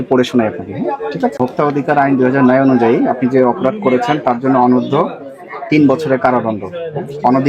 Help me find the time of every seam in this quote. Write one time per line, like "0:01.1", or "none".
0:01.3